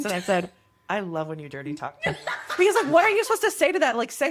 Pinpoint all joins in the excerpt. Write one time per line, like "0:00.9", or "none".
none